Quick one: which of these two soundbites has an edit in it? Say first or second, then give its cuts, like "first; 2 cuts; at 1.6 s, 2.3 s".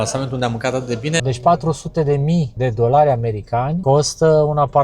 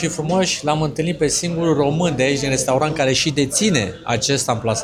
first; 3 cuts; at 1.2 s, 2.5 s, 3.8 s